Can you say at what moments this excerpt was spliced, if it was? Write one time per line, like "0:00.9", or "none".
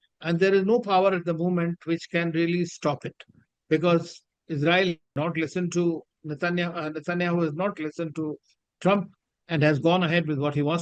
none